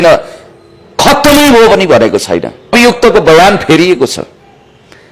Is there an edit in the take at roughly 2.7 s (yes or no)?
yes